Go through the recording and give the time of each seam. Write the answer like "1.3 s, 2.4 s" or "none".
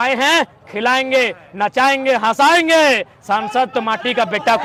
none